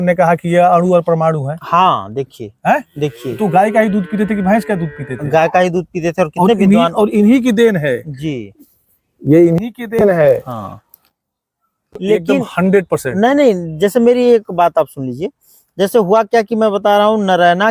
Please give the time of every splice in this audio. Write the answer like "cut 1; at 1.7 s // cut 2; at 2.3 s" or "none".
cut 1; at 12.0 s